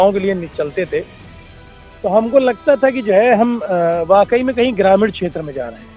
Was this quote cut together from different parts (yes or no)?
no